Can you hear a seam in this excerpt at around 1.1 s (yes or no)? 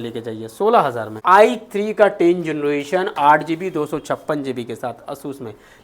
yes